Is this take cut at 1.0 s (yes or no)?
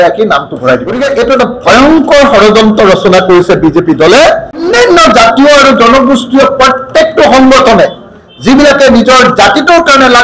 yes